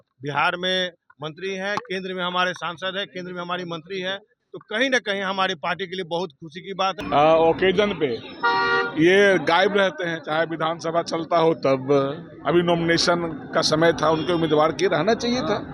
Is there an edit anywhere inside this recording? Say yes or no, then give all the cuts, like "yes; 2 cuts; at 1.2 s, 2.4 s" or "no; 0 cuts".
yes; 1 cut; at 6.9 s